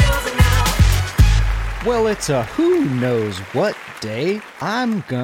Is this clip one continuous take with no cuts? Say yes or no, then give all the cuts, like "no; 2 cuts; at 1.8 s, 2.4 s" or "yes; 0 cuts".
no; 1 cut; at 1.6 s